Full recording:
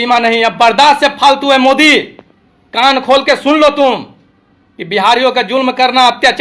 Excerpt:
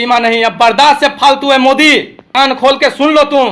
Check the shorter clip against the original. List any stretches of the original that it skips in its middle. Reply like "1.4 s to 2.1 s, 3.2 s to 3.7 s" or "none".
2.2 s to 2.6 s